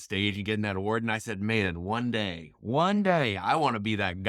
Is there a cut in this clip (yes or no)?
no